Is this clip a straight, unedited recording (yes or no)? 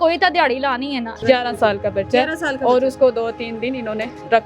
no